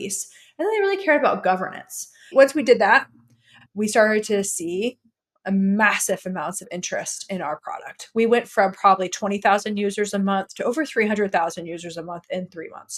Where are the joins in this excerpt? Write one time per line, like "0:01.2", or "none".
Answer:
0:02.3
0:03.6